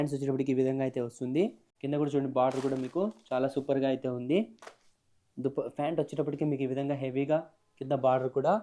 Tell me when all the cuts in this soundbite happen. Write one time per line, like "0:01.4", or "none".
0:01.7